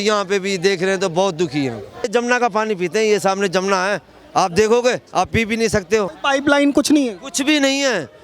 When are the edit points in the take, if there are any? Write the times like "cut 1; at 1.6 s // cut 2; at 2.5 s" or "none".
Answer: cut 1; at 2.1 s // cut 2; at 6.2 s